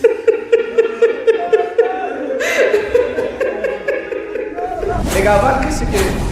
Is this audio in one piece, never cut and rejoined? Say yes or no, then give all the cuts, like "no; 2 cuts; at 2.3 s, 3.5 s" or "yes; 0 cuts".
no; 1 cut; at 5.0 s